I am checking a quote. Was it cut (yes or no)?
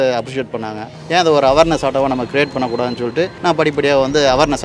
yes